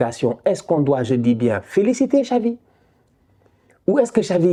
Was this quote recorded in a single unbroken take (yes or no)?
yes